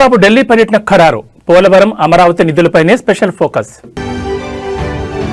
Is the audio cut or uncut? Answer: uncut